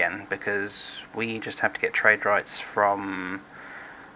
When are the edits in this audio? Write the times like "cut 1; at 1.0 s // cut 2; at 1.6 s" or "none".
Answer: none